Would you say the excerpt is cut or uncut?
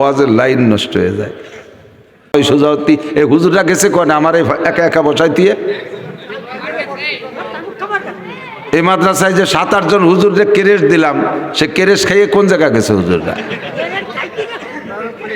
cut